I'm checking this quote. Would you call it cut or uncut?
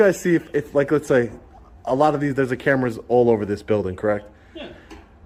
uncut